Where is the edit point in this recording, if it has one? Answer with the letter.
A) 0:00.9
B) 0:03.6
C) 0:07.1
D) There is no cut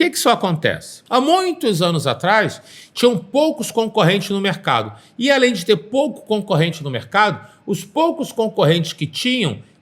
A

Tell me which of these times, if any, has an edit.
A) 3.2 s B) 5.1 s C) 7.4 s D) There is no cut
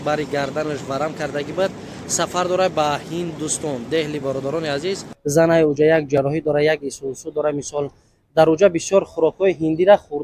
B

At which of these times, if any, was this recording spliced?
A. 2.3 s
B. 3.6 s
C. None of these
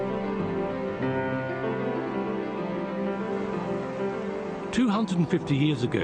A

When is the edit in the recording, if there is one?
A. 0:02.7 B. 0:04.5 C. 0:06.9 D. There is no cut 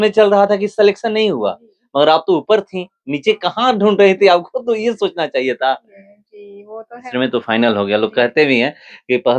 C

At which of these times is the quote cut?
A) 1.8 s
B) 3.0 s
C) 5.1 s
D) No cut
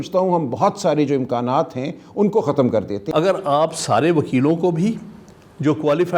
B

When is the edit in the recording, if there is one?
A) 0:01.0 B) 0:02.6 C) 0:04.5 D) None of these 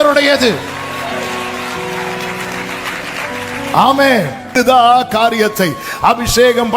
C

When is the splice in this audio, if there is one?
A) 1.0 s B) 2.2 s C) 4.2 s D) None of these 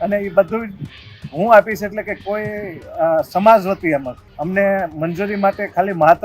C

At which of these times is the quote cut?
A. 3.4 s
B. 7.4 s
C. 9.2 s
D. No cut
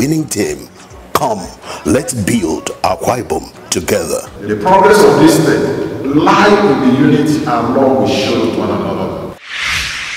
C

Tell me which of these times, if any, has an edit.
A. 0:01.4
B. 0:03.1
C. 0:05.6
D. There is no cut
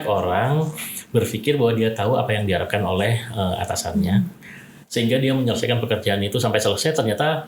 D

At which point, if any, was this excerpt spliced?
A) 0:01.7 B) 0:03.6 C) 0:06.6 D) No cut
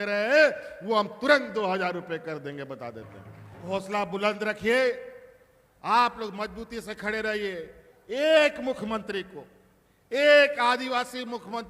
B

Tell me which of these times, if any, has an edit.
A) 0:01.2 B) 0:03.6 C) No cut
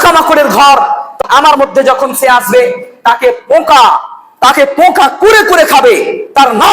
A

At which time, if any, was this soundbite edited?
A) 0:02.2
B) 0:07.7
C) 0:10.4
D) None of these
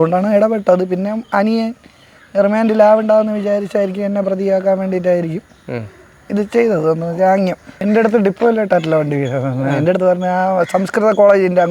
B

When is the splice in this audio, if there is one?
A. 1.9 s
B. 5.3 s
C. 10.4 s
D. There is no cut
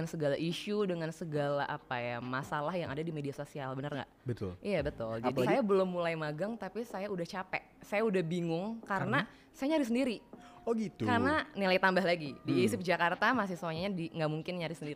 B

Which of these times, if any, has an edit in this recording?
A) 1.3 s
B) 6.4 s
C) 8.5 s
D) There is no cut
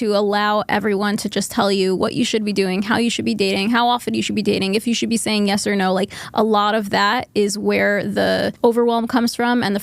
C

